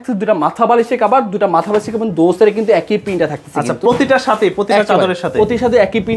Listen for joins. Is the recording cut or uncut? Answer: uncut